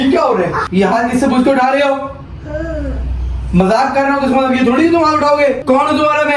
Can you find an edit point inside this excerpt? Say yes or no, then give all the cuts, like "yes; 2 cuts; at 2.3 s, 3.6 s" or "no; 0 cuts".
no; 0 cuts